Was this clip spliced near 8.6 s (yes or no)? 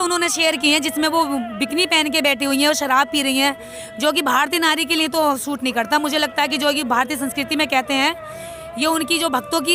no